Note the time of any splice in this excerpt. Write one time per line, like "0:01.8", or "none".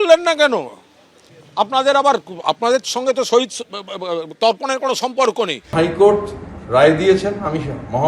0:05.6